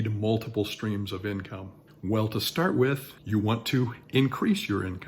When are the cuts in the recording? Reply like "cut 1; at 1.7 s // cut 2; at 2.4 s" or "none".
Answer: cut 1; at 3.1 s